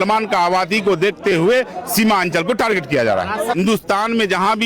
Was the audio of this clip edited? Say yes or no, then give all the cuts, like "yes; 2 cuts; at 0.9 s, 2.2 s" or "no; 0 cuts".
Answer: yes; 1 cut; at 3.6 s